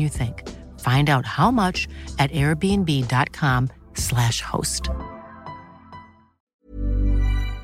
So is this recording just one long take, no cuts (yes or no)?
no